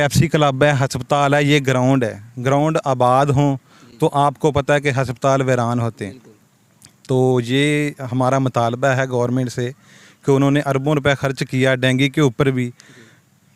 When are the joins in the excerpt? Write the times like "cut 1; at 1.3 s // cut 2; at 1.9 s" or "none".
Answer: none